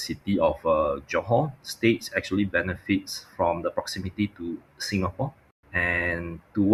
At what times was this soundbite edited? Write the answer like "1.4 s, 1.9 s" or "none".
none